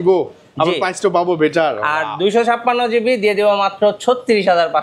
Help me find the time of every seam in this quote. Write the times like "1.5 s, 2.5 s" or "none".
none